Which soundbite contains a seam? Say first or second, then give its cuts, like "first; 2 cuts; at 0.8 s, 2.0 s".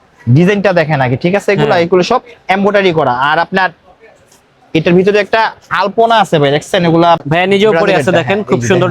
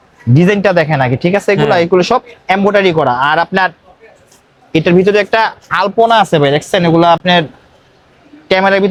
first; 1 cut; at 7.2 s